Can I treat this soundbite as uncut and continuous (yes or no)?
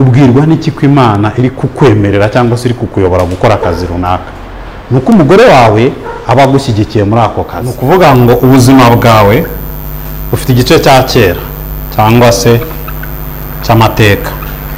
no